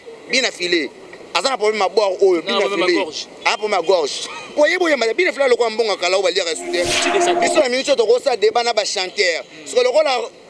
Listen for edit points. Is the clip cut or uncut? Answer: cut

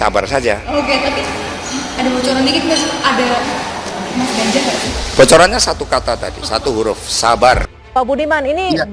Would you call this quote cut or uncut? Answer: cut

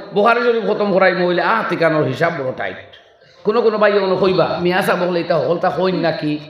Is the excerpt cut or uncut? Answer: cut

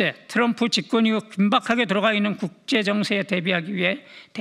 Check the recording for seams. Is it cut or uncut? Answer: uncut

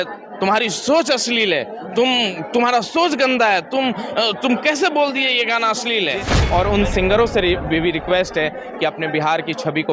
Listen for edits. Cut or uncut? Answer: cut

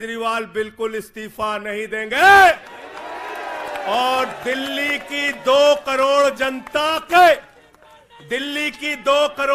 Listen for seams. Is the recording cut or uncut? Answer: uncut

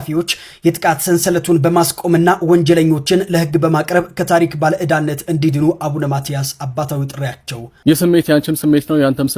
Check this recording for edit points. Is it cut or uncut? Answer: cut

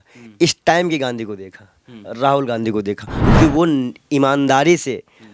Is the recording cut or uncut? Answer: cut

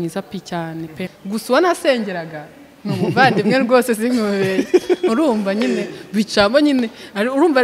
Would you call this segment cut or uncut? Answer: cut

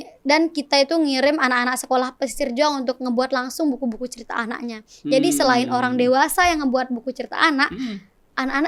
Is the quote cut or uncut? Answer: uncut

